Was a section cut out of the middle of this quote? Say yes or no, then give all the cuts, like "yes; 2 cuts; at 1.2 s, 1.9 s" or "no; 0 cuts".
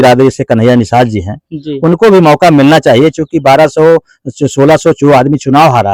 no; 0 cuts